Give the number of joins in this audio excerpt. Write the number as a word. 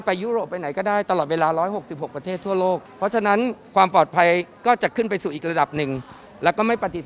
one